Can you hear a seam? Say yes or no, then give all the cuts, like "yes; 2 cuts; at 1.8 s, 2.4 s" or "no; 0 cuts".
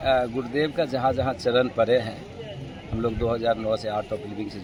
no; 0 cuts